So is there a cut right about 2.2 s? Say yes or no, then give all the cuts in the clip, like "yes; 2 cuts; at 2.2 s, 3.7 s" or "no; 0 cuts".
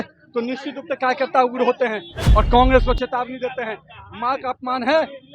yes; 1 cut; at 2.2 s